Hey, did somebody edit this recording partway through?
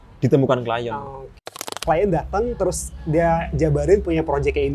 yes; 1 cut; at 1.6 s

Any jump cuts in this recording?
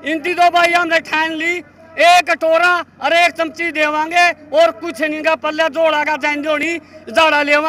no; 0 cuts

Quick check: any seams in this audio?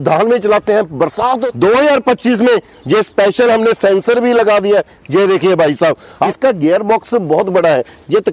yes; 2 cuts; at 1.5 s, 6.2 s

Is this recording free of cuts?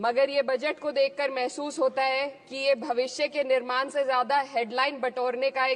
yes; 0 cuts

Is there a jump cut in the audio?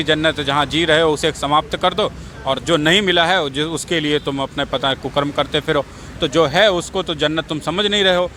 no; 0 cuts

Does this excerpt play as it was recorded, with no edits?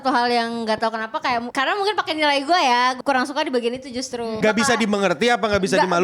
no; 3 cuts; at 1.5 s, 3.0 s, 4.4 s

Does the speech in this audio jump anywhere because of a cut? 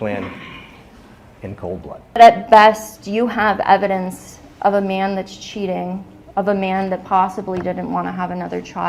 no; 0 cuts

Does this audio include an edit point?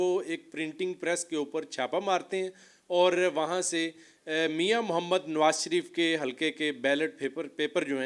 no; 0 cuts

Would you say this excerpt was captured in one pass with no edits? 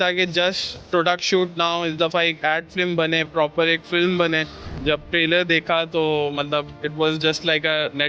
no; 2 cuts; at 4.7 s, 6.8 s

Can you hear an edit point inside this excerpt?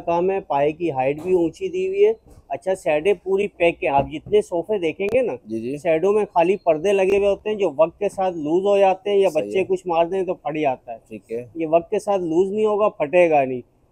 no; 0 cuts

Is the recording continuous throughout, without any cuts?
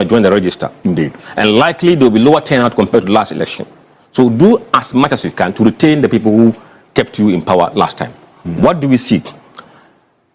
yes; 0 cuts

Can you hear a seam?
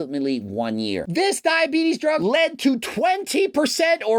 yes; 2 cuts; at 1.1 s, 2.2 s

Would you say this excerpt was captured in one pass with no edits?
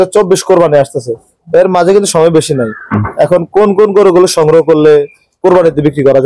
yes; 0 cuts

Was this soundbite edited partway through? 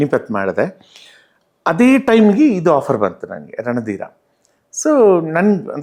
no; 0 cuts

